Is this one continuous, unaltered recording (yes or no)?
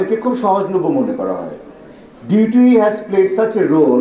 yes